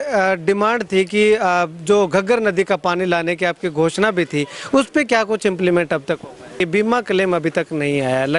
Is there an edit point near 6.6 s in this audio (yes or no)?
yes